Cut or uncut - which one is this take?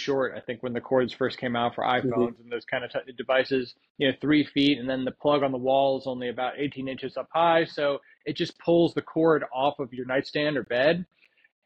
uncut